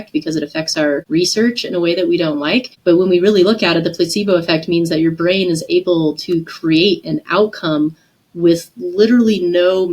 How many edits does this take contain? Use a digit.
2